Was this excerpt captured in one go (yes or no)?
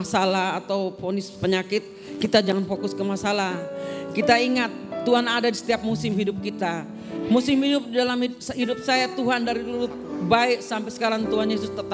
yes